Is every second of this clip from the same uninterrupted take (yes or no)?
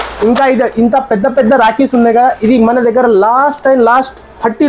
yes